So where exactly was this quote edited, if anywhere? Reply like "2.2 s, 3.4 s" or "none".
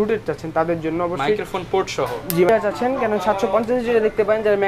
2.5 s